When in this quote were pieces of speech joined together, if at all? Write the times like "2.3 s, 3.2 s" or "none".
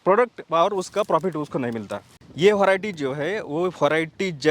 2.1 s